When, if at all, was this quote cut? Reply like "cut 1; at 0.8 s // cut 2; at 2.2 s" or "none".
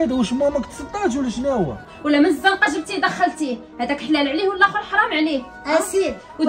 cut 1; at 1.9 s